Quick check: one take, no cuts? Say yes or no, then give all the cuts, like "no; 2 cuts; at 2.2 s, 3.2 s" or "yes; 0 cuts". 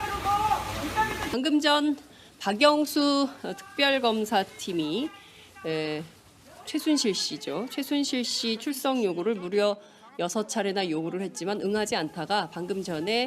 yes; 0 cuts